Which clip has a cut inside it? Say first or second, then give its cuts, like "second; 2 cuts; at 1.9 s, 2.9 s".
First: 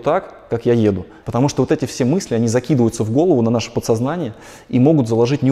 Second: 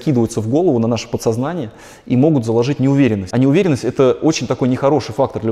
first; 1 cut; at 1.1 s